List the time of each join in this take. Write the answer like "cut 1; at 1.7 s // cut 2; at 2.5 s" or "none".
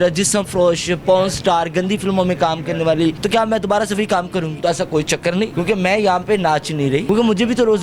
cut 1; at 3.2 s // cut 2; at 4.6 s // cut 3; at 5.5 s // cut 4; at 7.0 s